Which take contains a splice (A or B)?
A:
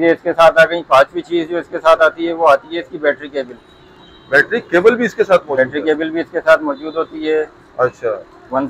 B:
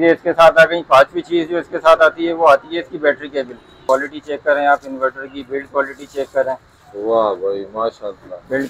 B